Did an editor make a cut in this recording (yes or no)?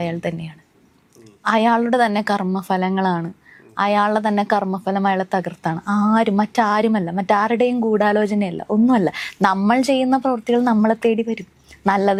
no